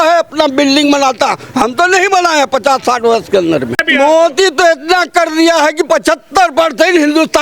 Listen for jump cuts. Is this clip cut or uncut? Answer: cut